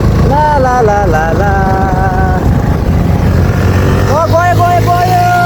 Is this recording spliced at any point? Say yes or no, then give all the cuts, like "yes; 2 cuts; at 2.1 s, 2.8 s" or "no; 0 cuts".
no; 0 cuts